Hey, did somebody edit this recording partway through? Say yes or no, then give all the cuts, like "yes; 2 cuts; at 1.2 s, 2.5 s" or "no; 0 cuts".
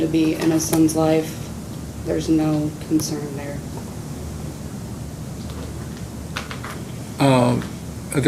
no; 0 cuts